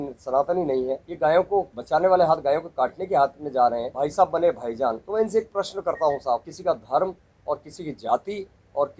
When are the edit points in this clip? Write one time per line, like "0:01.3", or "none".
0:01.1
0:01.8
0:03.9
0:05.0
0:06.5